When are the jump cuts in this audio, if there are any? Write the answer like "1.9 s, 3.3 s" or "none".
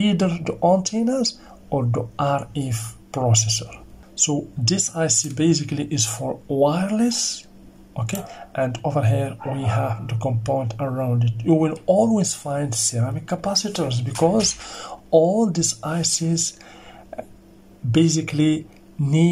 none